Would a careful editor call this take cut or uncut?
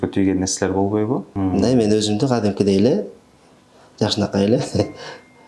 cut